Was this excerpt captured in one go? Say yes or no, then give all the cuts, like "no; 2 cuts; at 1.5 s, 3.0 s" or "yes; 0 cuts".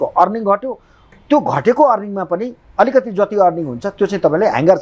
yes; 0 cuts